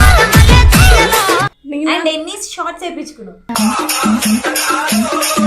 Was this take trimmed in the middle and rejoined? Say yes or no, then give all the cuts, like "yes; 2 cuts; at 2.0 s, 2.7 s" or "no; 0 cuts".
no; 0 cuts